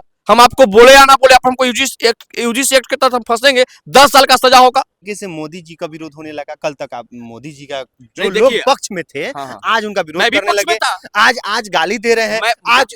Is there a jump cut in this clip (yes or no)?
yes